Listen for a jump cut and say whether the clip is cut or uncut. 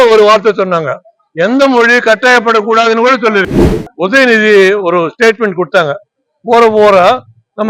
cut